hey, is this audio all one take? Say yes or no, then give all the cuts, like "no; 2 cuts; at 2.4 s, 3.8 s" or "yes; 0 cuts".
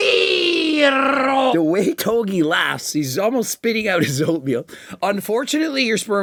yes; 0 cuts